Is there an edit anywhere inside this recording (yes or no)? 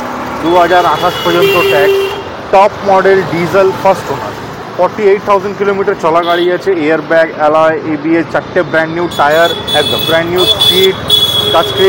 no